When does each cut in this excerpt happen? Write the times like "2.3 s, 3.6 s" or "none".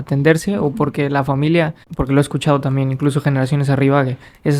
none